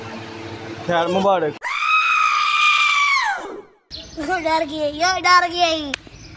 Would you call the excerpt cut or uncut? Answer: uncut